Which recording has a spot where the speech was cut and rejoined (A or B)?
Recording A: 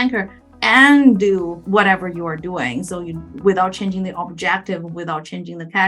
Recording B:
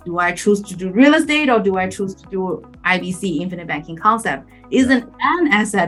A